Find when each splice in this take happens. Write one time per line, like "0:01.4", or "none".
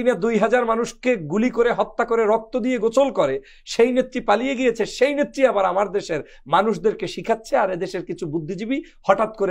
none